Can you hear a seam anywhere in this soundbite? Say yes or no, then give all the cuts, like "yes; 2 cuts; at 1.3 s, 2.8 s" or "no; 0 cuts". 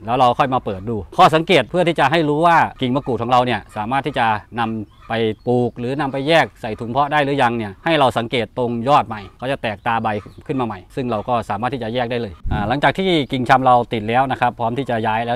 no; 0 cuts